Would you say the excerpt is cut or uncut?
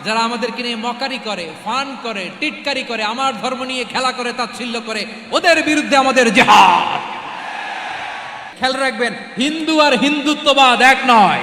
cut